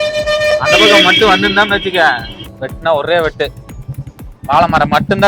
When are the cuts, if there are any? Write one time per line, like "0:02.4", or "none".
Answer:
0:02.6